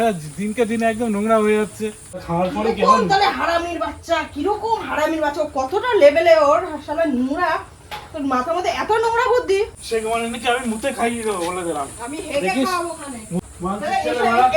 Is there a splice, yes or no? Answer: yes